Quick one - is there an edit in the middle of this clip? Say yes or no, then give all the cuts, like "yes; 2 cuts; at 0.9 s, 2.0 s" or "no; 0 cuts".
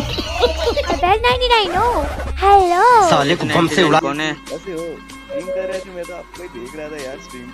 yes; 2 cuts; at 1.0 s, 5.3 s